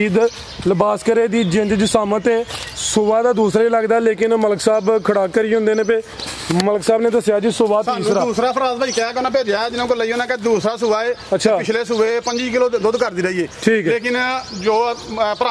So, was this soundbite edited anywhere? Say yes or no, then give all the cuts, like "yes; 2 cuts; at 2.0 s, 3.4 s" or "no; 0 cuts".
no; 0 cuts